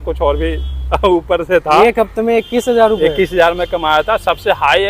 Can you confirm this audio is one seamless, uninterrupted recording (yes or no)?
yes